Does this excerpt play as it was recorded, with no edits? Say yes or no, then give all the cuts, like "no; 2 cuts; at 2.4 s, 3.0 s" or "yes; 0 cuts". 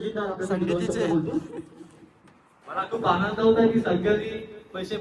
yes; 0 cuts